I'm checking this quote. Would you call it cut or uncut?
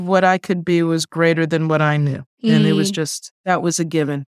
cut